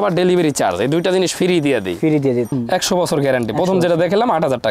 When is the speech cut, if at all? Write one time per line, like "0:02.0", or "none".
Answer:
0:02.6